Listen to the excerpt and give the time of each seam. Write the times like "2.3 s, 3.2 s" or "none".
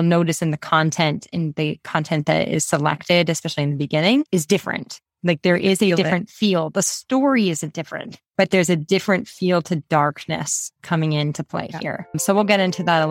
none